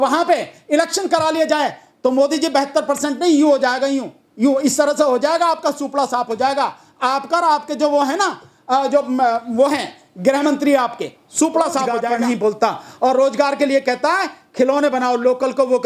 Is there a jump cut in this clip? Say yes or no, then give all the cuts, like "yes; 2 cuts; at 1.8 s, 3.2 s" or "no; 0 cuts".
yes; 1 cut; at 12.1 s